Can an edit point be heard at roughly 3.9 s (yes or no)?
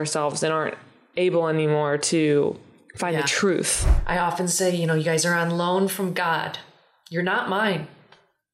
yes